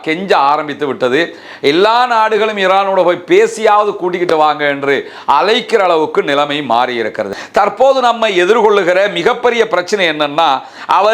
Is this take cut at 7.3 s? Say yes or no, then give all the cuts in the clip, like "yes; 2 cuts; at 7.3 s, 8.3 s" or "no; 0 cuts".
yes; 1 cut; at 7.3 s